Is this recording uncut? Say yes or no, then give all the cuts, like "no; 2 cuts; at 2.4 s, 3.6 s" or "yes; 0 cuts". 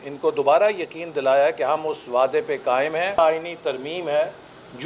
no; 1 cut; at 3.2 s